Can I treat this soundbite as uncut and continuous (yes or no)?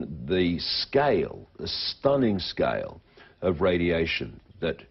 yes